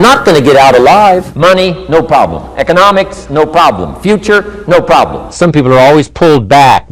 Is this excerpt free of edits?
no; 2 cuts; at 1.3 s, 5.3 s

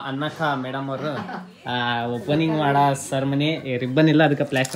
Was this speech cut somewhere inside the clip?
no; 0 cuts

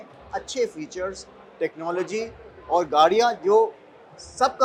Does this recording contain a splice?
no; 0 cuts

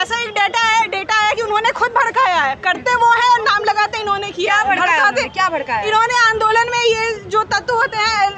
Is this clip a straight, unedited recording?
yes; 0 cuts

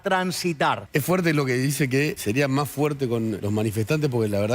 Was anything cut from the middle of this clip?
yes; 3 cuts; at 0.8 s, 2.2 s, 3.4 s

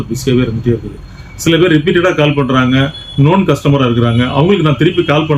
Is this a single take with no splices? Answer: yes; 0 cuts

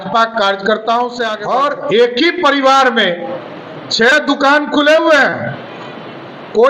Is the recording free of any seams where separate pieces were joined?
no; 1 cut; at 1.3 s

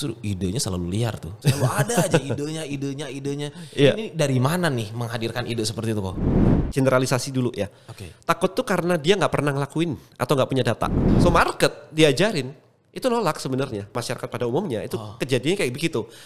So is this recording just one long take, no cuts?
no; 3 cuts; at 6.3 s, 11.1 s, 14.0 s

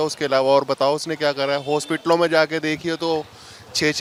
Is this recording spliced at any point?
no; 0 cuts

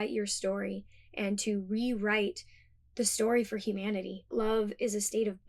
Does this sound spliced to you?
yes; 1 cut; at 4.3 s

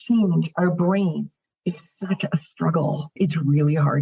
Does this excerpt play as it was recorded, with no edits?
no; 1 cut; at 3.1 s

